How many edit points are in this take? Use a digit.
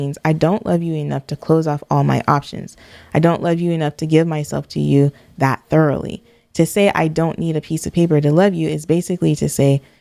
0